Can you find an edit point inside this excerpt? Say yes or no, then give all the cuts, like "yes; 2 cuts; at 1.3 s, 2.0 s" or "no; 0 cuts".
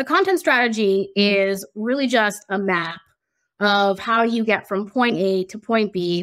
no; 0 cuts